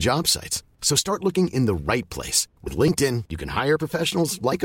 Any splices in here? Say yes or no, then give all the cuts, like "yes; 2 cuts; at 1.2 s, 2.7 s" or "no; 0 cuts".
no; 0 cuts